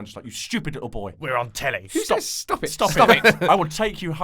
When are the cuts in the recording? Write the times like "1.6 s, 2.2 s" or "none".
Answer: 1.8 s